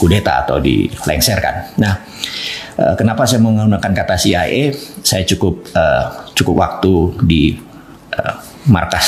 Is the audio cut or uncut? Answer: uncut